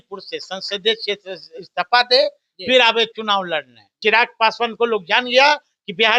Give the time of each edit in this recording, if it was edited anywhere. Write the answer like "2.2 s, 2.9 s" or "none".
3.9 s